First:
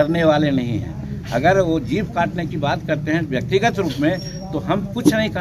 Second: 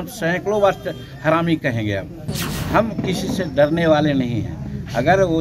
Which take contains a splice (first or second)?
second